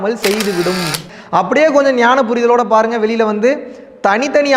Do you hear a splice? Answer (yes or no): yes